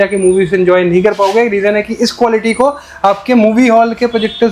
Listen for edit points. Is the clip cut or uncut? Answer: uncut